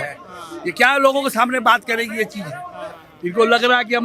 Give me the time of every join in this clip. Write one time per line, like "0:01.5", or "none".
none